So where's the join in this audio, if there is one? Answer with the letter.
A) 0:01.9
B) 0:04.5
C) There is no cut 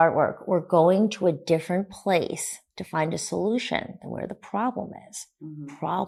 C